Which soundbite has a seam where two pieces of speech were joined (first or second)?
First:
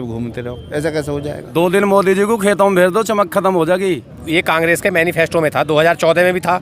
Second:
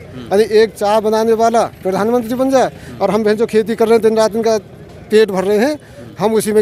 first